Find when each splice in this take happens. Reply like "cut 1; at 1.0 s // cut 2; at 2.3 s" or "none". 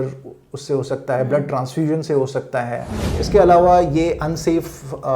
cut 1; at 3.2 s